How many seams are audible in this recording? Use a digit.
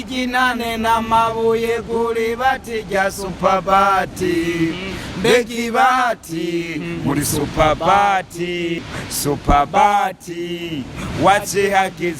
1